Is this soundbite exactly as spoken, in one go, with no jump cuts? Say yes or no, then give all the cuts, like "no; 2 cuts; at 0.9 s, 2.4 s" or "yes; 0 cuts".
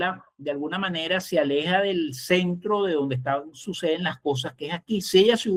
yes; 0 cuts